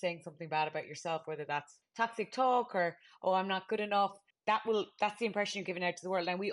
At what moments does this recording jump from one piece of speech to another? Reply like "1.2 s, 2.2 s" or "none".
1.8 s, 4.3 s